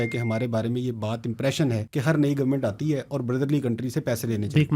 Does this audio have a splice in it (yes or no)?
yes